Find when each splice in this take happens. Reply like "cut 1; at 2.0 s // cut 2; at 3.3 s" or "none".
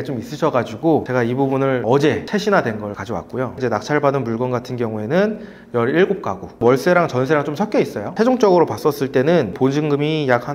none